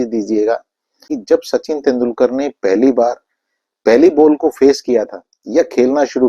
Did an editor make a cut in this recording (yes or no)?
yes